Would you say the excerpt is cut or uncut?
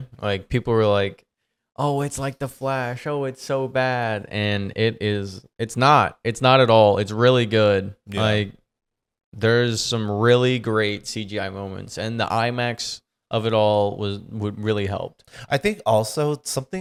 uncut